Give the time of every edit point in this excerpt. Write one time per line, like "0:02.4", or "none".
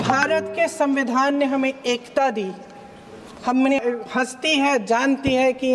0:03.8